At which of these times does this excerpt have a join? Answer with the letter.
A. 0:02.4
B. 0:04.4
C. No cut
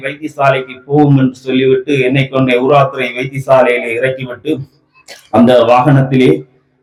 C